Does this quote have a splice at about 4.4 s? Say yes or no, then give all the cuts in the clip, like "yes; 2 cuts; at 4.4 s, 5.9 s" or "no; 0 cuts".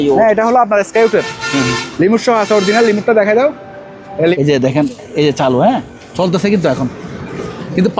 yes; 1 cut; at 4.4 s